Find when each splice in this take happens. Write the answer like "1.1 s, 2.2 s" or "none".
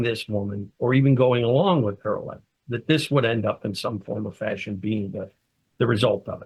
none